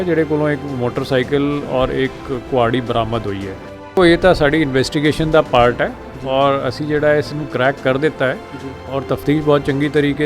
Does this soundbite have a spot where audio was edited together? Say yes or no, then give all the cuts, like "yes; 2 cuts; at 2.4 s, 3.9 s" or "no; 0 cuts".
yes; 1 cut; at 4.0 s